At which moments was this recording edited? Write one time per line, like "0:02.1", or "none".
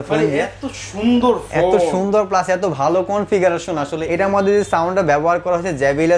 0:04.0